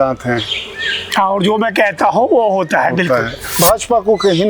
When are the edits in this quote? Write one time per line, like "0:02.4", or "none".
0:03.4